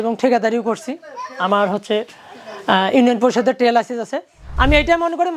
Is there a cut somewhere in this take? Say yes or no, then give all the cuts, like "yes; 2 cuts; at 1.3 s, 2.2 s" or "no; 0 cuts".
yes; 1 cut; at 4.4 s